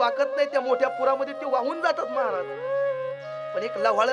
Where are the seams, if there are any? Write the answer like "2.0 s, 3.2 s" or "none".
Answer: none